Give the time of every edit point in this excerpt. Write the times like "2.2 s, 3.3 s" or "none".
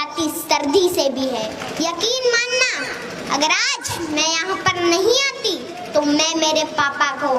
1.6 s